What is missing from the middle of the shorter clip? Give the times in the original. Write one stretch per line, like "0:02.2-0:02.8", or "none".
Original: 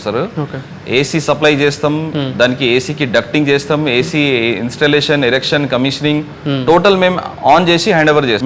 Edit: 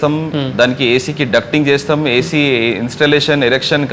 none